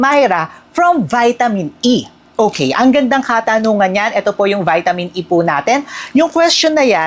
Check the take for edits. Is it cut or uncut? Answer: uncut